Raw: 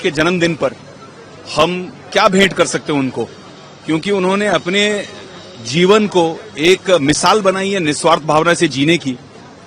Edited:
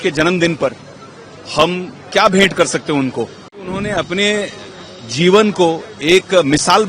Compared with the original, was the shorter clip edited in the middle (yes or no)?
yes